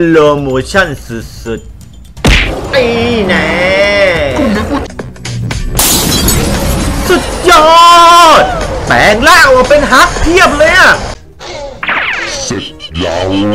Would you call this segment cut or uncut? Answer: cut